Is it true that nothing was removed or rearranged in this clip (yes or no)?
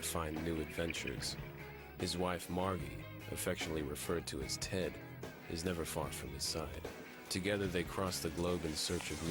no